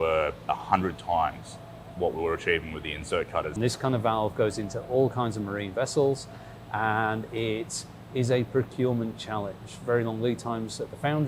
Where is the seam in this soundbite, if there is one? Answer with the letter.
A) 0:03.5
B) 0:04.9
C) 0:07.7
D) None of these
A